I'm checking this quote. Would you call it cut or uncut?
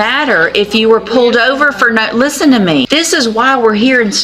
cut